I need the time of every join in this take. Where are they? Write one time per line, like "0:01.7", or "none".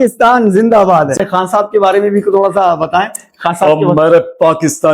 0:01.2